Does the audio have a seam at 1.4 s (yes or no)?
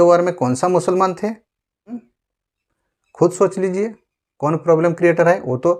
no